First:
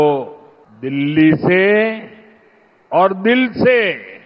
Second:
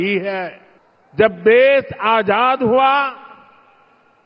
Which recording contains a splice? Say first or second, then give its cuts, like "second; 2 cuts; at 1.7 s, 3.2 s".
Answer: second; 1 cut; at 2.4 s